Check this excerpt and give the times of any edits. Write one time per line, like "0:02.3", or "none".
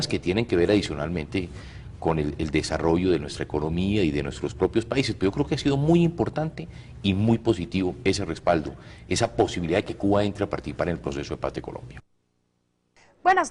0:06.3